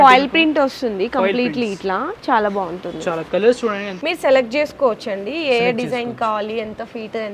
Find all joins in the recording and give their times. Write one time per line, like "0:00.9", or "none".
0:03.9